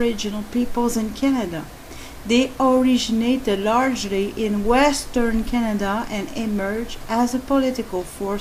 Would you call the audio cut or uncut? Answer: uncut